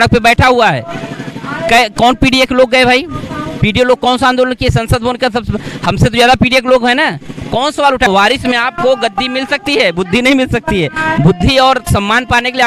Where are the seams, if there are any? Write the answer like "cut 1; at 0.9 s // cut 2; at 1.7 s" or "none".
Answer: cut 1; at 8.1 s